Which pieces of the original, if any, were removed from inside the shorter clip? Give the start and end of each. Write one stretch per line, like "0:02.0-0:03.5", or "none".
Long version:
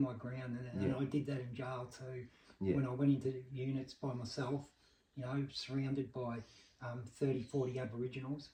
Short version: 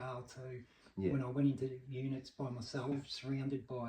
0:04.6-0:05.4